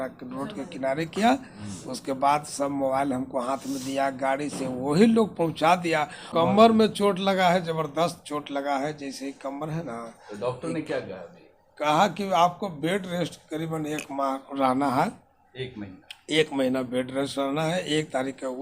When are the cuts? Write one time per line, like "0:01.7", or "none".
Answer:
0:06.2